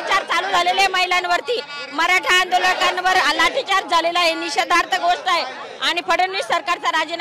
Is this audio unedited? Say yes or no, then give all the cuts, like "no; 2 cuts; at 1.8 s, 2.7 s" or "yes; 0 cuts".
yes; 0 cuts